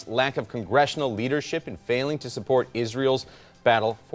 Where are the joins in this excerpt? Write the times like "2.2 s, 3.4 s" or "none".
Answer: none